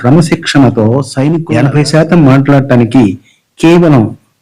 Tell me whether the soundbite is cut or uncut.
cut